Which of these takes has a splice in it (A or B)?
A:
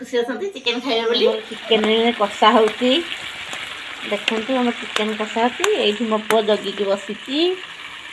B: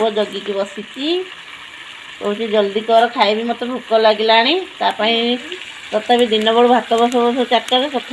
A